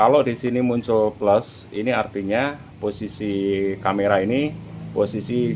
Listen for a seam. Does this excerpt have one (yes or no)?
no